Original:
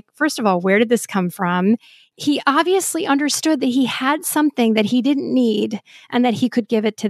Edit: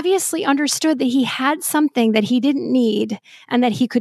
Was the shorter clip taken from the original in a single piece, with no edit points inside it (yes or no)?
yes